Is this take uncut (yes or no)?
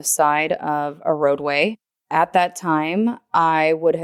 yes